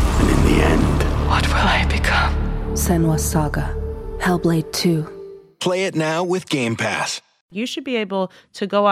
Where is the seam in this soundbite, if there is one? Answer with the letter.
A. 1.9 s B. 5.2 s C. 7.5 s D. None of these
C